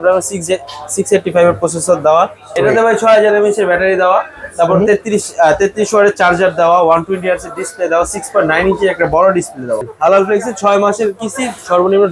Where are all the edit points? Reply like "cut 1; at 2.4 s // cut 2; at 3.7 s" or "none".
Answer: cut 1; at 2.5 s // cut 2; at 9.9 s